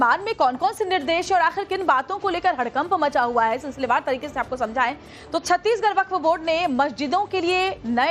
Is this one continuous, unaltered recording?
yes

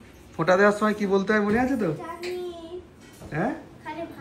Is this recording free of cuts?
yes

